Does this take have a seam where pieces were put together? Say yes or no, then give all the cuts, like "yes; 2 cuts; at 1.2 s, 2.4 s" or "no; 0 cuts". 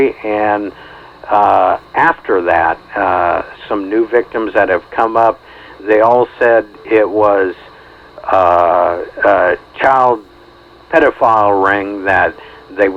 no; 0 cuts